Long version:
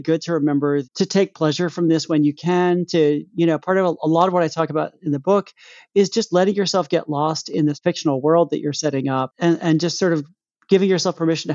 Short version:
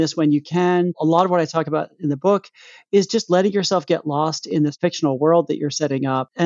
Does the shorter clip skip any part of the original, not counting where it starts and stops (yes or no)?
yes